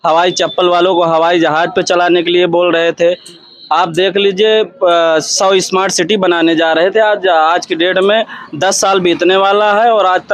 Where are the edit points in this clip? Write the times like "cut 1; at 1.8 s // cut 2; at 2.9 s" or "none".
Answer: none